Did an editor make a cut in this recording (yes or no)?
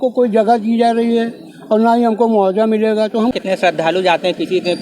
yes